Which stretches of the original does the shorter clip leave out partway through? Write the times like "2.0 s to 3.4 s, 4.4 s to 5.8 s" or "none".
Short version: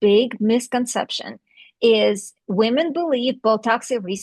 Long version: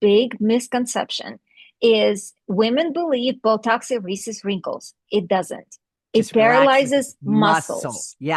none